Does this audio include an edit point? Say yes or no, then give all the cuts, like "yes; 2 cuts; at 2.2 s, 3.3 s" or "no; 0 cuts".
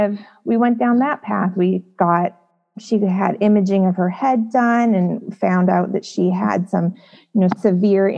no; 0 cuts